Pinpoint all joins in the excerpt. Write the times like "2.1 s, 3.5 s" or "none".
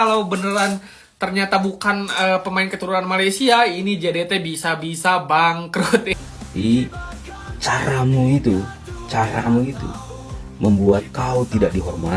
6.1 s